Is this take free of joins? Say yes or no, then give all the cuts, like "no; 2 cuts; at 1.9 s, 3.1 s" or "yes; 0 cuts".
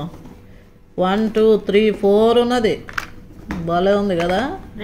yes; 0 cuts